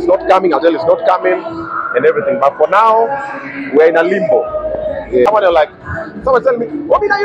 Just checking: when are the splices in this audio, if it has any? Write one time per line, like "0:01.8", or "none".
0:05.3

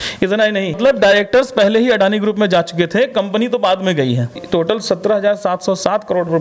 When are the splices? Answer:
0:00.8
0:04.4

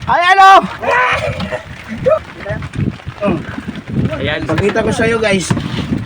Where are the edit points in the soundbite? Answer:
0:02.2

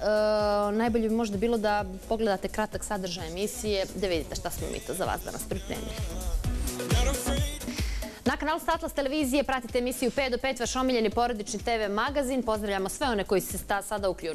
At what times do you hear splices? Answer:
0:09.7

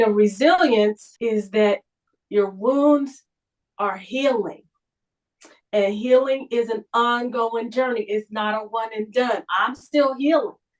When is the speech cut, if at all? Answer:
0:01.1

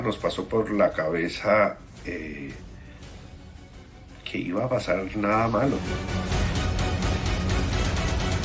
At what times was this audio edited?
0:05.8

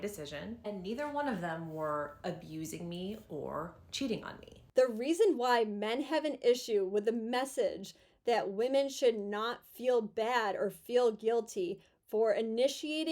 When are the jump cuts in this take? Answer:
0:04.7

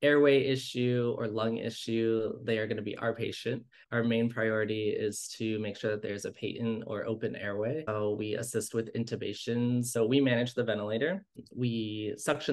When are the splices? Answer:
0:03.7
0:07.9
0:10.0
0:11.4

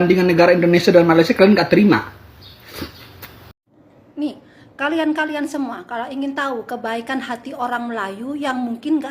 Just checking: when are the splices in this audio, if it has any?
0:03.5

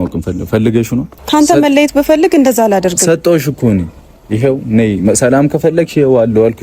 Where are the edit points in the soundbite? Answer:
0:01.1

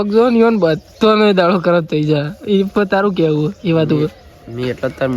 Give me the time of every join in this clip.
none

